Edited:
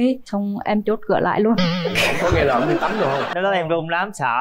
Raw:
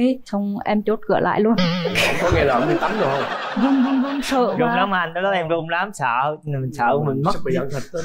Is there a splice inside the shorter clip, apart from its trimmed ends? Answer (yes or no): yes